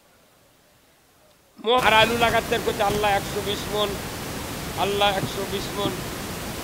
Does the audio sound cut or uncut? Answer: cut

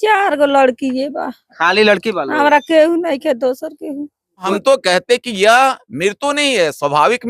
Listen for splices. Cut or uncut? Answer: cut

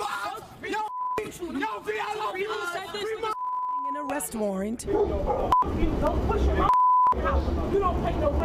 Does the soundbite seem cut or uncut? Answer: cut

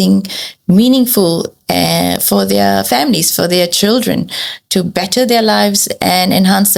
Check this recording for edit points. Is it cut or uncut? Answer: uncut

